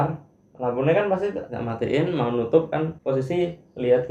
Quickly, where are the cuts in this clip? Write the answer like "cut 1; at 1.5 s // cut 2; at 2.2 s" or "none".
cut 1; at 1.5 s // cut 2; at 3.0 s